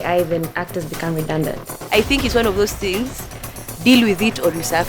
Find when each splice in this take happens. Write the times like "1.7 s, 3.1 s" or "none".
1.8 s